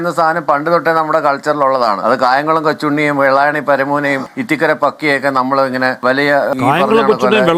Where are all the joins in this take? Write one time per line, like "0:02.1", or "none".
0:02.0